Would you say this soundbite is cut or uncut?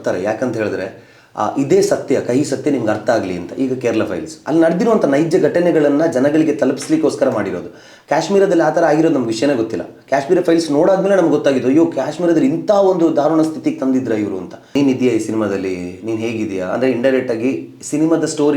cut